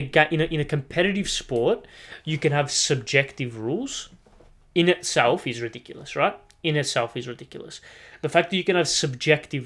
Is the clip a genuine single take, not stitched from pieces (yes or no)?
yes